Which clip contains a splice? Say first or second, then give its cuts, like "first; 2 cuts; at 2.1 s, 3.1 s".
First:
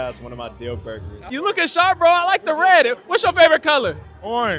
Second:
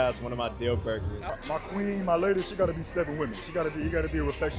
second; 1 cut; at 1.3 s